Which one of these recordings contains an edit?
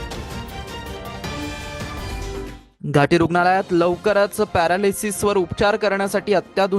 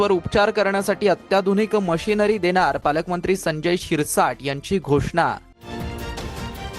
first; 1 cut; at 2.6 s

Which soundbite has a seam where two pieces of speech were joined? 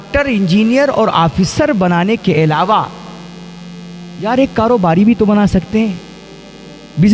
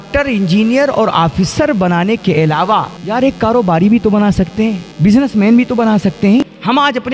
second; 3 cuts; at 3.0 s, 4.9 s, 6.4 s

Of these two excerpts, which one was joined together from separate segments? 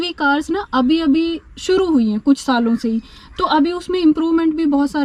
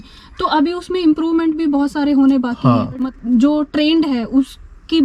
second; 1 cut; at 3.1 s

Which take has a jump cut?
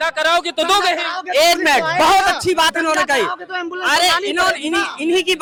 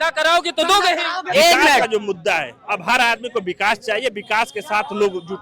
second; 1 cut; at 1.8 s

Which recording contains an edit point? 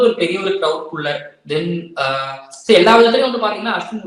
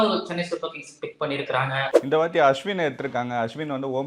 second; 1 cut; at 1.9 s

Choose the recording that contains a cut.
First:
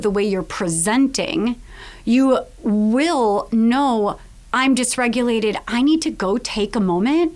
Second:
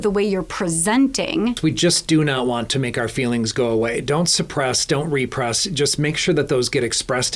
second; 1 cut; at 1.6 s

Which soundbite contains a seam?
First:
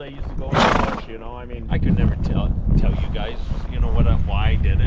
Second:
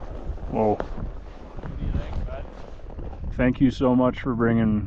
second; 1 cut; at 3.3 s

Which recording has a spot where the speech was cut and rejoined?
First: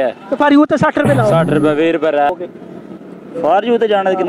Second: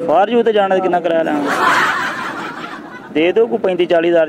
first; 1 cut; at 2.3 s

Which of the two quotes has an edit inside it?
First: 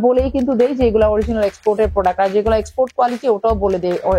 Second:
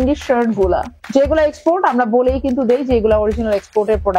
second; 1 cut; at 1.0 s

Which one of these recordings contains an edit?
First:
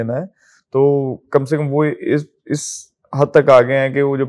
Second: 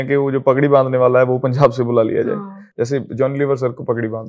second; 1 cut; at 2.6 s

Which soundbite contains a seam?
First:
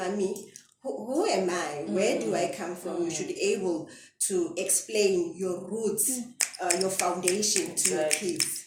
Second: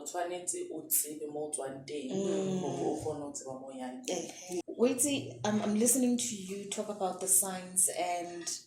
second; 1 cut; at 4.6 s

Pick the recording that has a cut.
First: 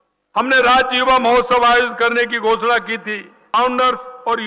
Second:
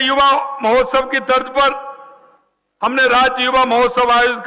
first; 1 cut; at 3.4 s

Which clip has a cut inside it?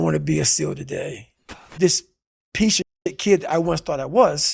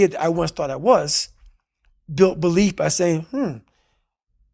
first; 1 cut; at 1.6 s

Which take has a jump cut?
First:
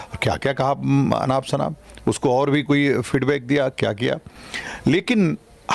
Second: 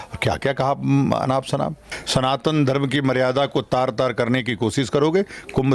second; 1 cut; at 1.9 s

